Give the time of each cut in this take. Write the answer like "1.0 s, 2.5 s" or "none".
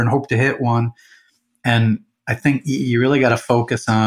none